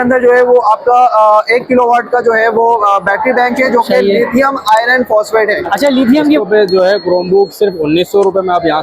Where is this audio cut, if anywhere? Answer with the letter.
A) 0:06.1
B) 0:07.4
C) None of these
A